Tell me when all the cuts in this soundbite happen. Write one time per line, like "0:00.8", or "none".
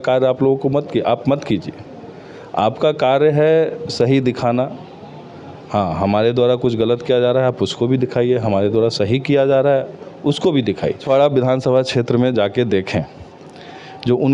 0:11.0